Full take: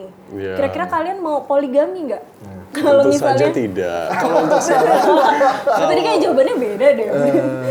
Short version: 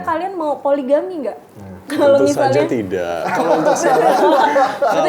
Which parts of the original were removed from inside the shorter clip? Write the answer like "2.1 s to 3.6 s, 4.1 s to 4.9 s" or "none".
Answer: none